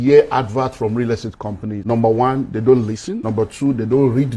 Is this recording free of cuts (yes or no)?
no